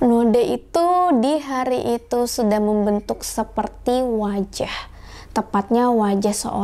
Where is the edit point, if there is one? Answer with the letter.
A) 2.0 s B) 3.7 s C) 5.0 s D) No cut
D